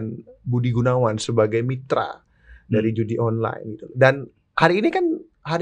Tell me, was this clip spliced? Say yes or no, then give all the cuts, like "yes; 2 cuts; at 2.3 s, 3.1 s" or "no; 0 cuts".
no; 0 cuts